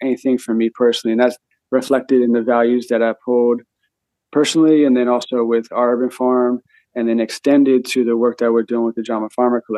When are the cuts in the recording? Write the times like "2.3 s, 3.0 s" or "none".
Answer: none